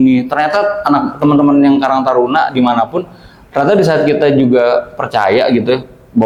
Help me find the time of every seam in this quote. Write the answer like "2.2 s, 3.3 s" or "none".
none